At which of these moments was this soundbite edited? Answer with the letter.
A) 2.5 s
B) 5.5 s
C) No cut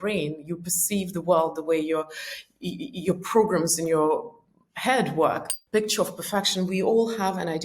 B